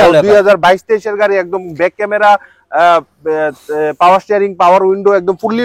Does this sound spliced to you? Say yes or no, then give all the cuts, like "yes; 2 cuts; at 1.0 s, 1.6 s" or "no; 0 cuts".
no; 0 cuts